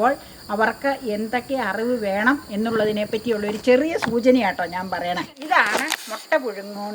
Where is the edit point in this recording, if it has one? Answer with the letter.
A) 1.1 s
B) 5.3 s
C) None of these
B